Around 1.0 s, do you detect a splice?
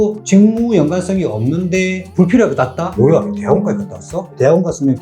no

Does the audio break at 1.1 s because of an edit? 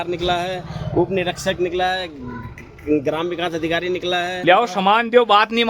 no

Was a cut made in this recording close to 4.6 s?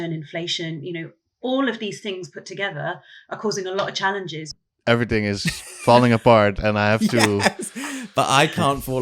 yes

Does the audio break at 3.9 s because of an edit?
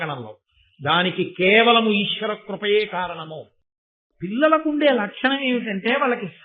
yes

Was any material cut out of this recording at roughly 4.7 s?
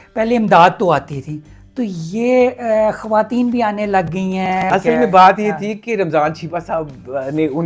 yes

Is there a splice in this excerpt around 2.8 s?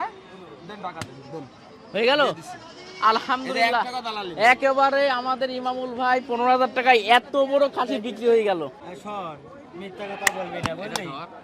no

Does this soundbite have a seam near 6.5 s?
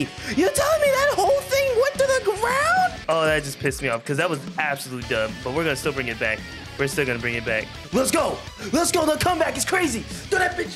no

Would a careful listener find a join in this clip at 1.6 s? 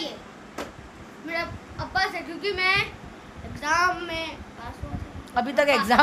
no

